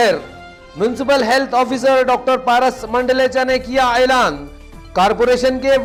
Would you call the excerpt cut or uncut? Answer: uncut